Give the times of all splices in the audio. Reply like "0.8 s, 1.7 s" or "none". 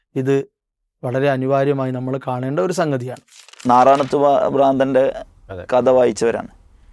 3.5 s